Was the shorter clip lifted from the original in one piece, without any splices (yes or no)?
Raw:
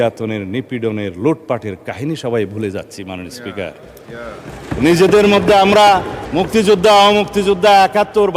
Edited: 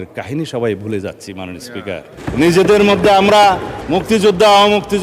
no